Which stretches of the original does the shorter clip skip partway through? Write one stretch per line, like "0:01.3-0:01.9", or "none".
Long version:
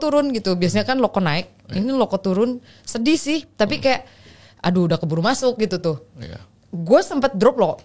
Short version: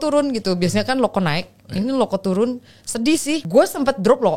0:03.4-0:06.8